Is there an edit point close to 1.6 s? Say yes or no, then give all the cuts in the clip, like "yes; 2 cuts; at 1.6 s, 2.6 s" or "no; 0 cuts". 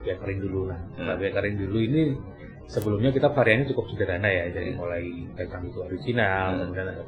no; 0 cuts